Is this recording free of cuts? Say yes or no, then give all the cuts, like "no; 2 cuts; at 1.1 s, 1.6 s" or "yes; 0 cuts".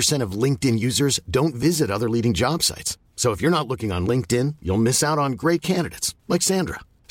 yes; 0 cuts